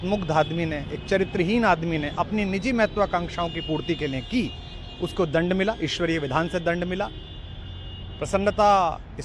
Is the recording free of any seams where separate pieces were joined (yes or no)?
yes